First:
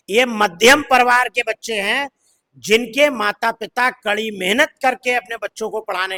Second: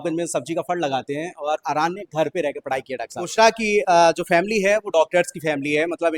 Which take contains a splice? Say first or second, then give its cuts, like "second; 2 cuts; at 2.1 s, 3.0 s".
second; 1 cut; at 3.3 s